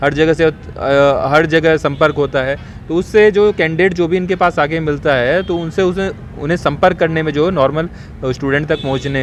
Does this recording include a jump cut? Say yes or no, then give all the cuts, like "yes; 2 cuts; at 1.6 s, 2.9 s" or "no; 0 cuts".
no; 0 cuts